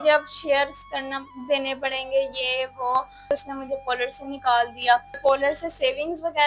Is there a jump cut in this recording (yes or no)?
yes